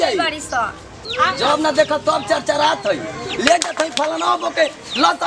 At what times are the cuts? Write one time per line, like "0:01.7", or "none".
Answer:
0:01.1